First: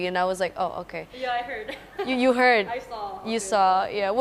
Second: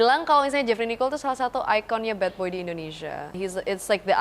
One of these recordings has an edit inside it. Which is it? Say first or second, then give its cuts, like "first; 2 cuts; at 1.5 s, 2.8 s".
second; 1 cut; at 3.3 s